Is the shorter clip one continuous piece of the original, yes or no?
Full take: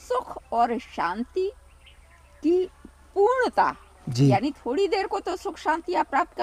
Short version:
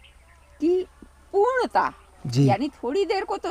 yes